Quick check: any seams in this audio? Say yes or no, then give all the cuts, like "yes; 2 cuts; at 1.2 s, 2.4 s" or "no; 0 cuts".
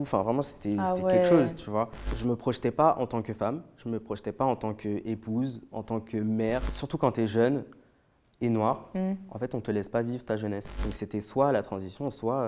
yes; 3 cuts; at 2.1 s, 6.7 s, 10.7 s